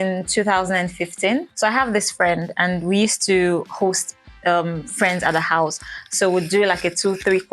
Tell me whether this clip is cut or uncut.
cut